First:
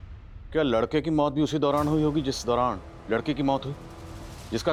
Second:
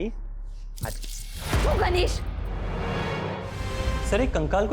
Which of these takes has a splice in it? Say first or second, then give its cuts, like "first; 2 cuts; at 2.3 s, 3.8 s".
second; 1 cut; at 3.6 s